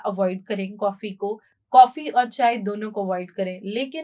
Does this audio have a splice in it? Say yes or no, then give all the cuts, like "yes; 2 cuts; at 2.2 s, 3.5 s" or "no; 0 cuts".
no; 0 cuts